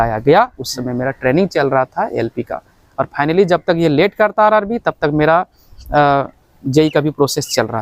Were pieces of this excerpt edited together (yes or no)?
no